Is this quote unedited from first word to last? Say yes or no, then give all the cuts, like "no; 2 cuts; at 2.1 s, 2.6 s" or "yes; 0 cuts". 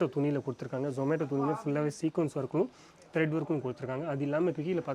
yes; 0 cuts